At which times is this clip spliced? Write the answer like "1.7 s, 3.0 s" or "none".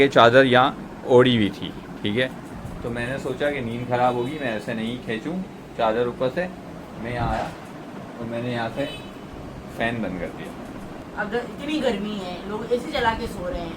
11.0 s